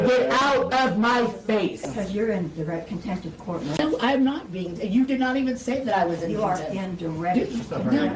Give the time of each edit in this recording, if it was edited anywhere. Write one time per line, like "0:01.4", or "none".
0:02.8
0:07.2

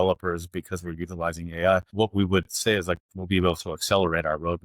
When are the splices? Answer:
0:01.9

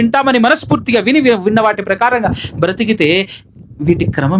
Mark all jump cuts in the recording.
none

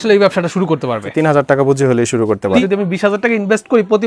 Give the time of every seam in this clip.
0:01.1
0:02.6

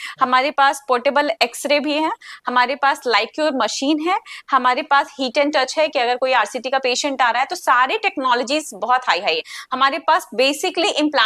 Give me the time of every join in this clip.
none

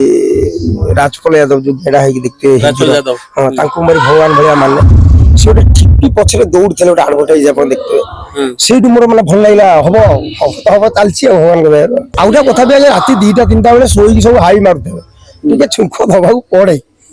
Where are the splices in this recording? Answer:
0:12.1

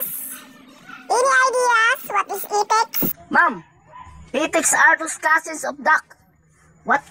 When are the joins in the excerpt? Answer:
0:03.2

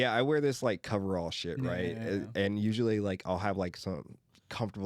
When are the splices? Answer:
none

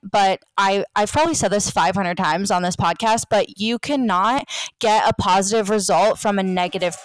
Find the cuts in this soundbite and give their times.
none

